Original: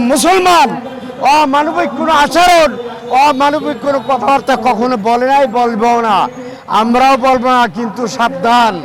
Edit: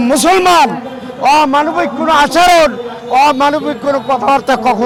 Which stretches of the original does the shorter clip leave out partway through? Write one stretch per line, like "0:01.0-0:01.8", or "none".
none